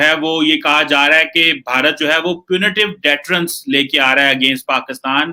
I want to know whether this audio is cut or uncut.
uncut